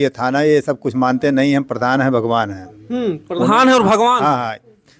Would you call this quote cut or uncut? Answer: uncut